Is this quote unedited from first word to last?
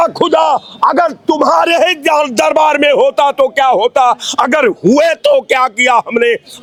yes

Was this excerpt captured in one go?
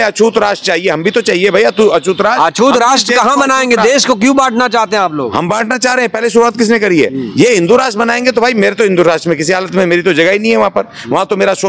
yes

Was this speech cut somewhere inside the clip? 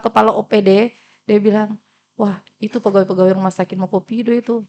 no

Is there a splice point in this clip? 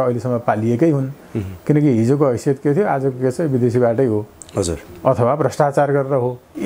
no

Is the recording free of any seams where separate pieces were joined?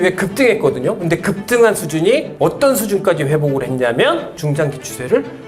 no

